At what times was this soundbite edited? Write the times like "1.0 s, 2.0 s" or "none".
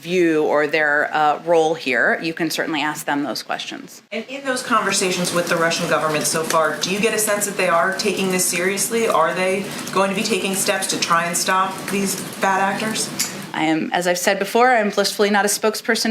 4.0 s